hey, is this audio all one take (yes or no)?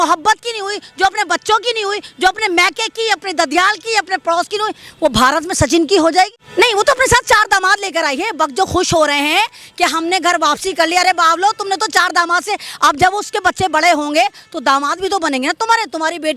no